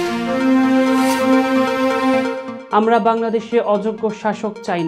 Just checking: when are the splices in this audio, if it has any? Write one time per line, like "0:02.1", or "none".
0:02.5